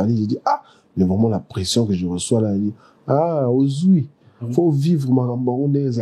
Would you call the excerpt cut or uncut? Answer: uncut